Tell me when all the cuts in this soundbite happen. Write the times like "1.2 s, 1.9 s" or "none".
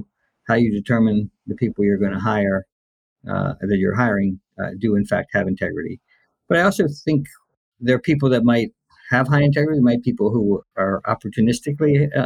10.7 s